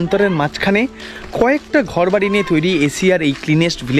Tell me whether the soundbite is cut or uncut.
uncut